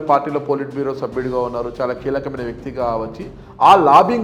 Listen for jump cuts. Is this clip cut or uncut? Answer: uncut